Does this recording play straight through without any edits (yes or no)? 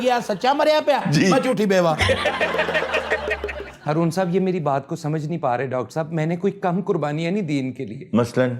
yes